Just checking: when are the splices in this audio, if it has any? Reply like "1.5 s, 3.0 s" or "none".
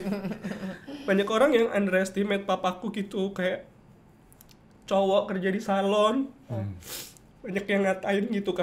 none